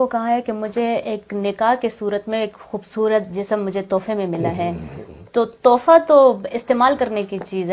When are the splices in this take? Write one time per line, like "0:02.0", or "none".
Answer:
none